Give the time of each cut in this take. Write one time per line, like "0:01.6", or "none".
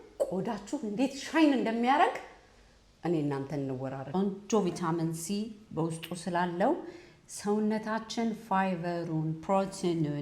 0:04.0